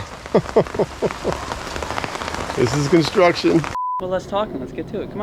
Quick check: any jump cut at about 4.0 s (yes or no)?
yes